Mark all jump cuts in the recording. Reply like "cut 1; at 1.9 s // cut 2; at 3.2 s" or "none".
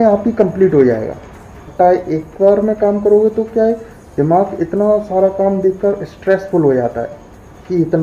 cut 1; at 1.6 s